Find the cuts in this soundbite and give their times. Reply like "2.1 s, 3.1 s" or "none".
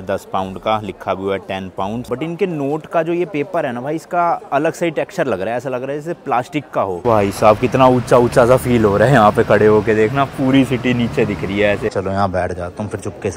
2.1 s, 7.0 s, 11.9 s